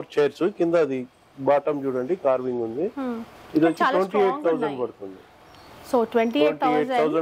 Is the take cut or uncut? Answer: uncut